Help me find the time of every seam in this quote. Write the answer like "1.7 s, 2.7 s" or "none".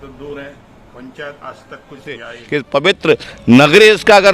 2.3 s